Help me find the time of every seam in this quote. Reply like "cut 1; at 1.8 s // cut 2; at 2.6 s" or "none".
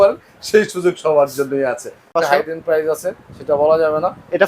cut 1; at 2.1 s

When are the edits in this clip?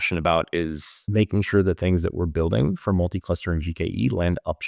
cut 1; at 1.0 s

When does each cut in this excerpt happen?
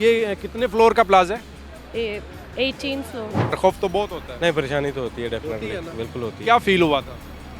cut 1; at 3.6 s

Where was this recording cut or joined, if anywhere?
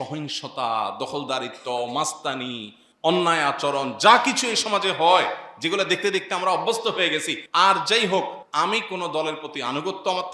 cut 1; at 7.4 s // cut 2; at 8.4 s

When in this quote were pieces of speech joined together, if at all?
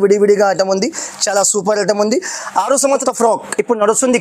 cut 1; at 3.0 s

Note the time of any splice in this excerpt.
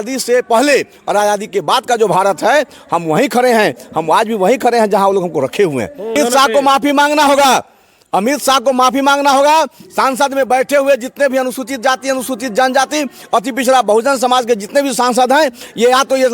cut 1; at 6.2 s

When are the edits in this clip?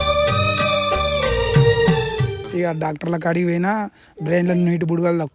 cut 1; at 2.4 s

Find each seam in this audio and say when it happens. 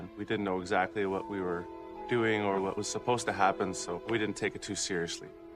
cut 1; at 3.0 s

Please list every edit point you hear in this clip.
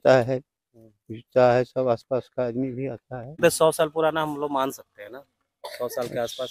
cut 1; at 3.4 s

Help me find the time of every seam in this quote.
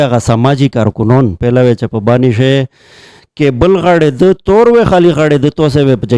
cut 1; at 1.4 s

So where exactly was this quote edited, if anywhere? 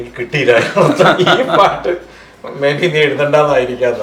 none

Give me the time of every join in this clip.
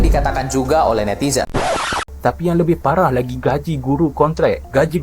cut 1; at 1.6 s

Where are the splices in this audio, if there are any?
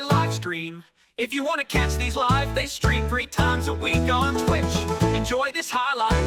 none

